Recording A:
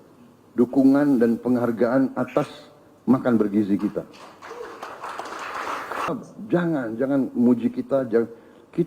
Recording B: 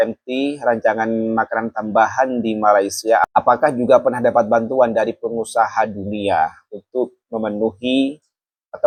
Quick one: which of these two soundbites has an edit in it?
A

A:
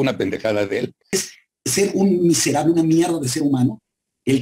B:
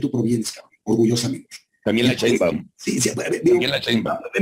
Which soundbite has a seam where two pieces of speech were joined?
A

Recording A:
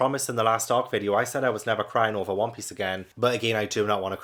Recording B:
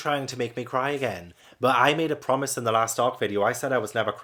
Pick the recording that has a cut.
A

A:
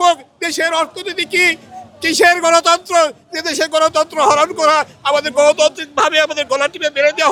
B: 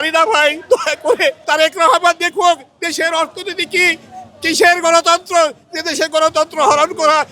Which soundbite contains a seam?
B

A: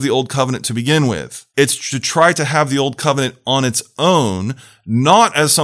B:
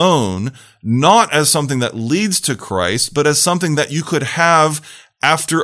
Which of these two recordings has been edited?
A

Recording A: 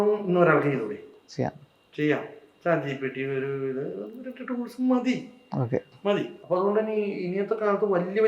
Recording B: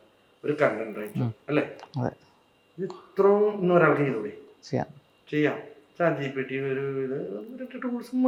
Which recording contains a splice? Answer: A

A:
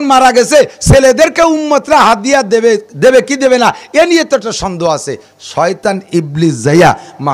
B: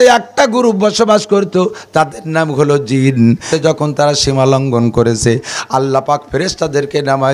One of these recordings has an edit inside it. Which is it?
B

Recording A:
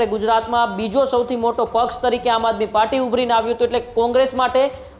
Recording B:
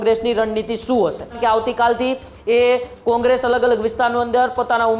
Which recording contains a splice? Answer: B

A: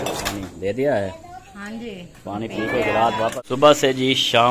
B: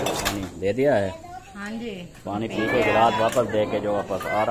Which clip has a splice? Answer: A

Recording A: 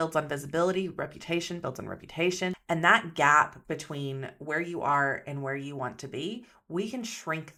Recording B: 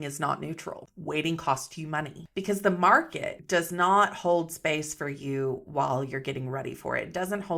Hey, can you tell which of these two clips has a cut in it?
B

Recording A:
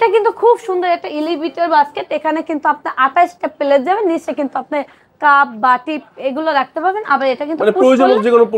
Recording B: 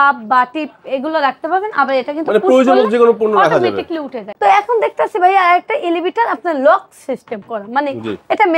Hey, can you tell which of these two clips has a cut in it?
B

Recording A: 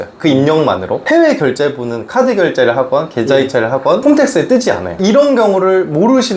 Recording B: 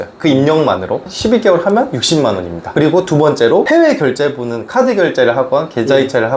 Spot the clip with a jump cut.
A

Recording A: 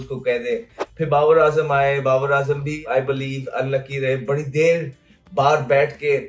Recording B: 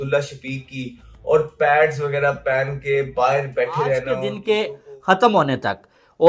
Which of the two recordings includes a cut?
B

